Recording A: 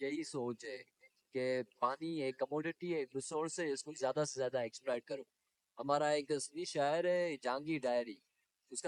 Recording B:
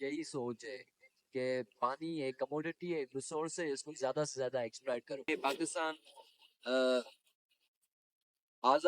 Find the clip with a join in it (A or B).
B